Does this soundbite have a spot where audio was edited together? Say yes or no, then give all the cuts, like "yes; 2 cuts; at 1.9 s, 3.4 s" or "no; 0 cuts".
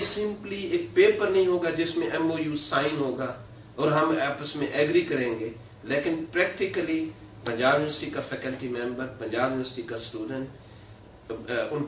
no; 0 cuts